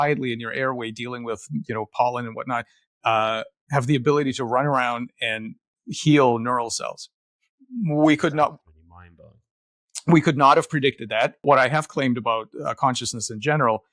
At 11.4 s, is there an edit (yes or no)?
yes